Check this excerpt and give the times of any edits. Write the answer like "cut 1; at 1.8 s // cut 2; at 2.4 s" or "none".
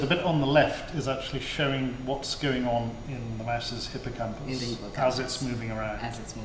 none